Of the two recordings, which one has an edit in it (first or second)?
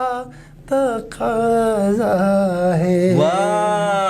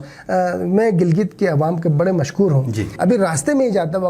second